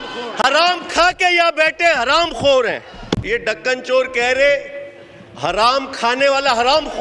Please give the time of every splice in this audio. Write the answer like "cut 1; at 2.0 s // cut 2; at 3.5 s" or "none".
cut 1; at 2.9 s